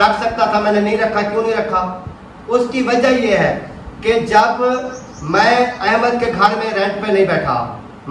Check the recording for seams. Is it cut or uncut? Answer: uncut